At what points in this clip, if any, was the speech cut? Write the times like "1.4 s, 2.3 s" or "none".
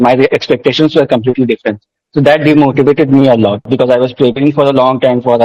3.7 s